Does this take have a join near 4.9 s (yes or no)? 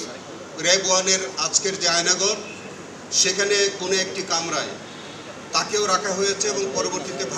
no